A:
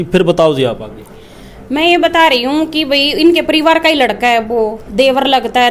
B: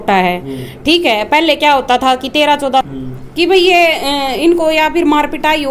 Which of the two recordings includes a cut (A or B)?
B